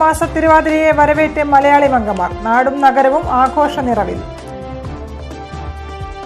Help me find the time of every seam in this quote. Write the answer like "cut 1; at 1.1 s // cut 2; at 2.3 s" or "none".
none